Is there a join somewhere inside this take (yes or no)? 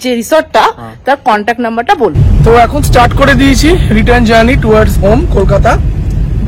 yes